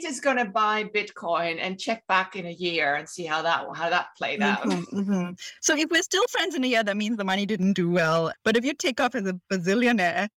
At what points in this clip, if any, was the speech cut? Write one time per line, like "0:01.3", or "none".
0:08.3